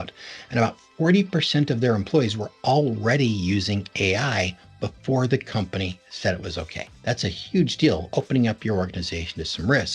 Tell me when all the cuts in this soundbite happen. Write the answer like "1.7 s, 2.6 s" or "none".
6.8 s